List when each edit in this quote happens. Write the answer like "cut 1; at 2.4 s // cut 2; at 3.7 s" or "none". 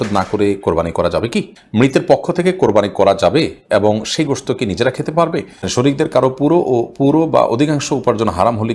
cut 1; at 1.6 s // cut 2; at 5.6 s